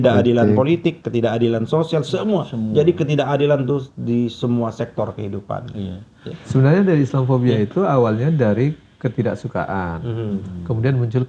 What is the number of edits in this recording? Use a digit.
1